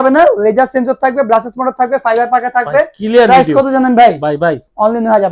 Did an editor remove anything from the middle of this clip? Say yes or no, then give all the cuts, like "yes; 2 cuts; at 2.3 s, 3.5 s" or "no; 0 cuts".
no; 0 cuts